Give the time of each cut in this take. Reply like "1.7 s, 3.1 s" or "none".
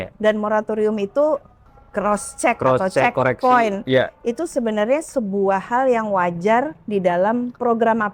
1.7 s